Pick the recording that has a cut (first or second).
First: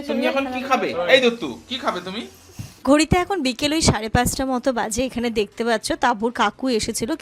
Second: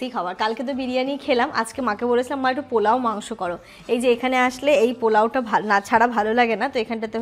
first